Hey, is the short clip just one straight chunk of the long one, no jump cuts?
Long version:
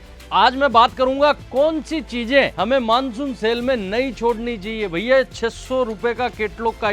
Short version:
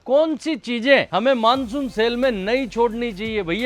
yes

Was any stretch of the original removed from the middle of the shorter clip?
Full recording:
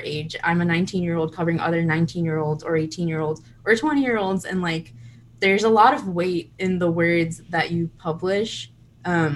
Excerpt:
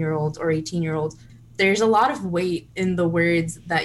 yes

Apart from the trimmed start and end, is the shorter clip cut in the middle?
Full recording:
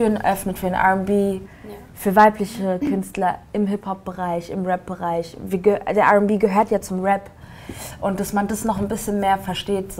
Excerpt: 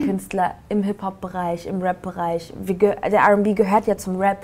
no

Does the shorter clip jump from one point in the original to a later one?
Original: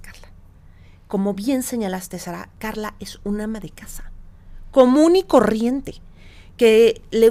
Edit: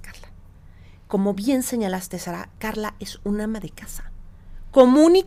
no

